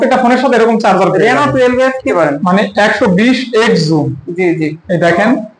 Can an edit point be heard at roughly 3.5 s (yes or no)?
no